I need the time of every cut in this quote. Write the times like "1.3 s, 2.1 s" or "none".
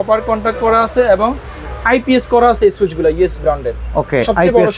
none